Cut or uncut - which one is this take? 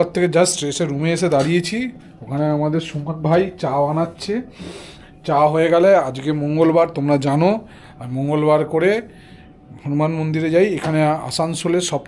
uncut